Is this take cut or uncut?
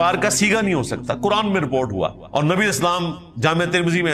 cut